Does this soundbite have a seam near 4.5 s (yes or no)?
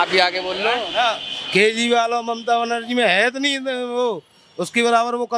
no